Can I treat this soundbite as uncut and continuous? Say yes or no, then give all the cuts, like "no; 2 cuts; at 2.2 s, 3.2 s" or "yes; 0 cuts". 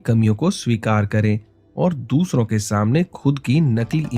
yes; 0 cuts